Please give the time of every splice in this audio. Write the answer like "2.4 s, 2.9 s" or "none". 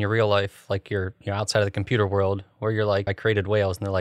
3.1 s